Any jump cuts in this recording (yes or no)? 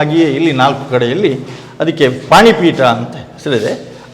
yes